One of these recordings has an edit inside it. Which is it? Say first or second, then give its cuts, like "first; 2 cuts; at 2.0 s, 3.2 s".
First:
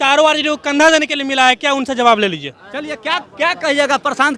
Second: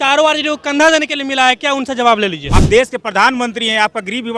second; 1 cut; at 2.5 s